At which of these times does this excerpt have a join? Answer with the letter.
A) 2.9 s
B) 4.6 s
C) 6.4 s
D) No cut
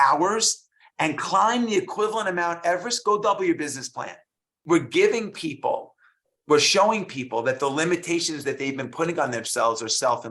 B